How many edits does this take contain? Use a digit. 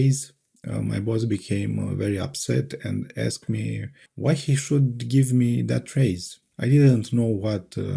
0